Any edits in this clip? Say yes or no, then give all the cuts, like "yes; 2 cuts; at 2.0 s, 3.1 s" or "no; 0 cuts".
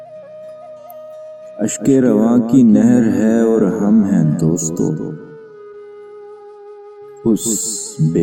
no; 0 cuts